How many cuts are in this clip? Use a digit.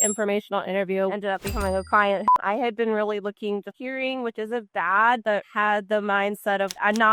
1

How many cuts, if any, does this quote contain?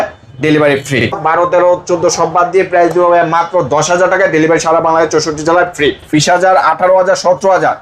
2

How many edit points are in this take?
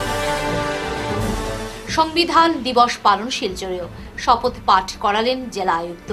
0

